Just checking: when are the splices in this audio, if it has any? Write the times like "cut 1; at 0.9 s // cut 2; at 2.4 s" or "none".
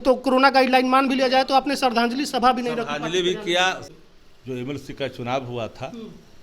cut 1; at 3.9 s